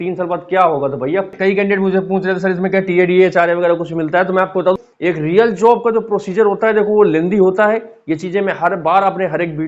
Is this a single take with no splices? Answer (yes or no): no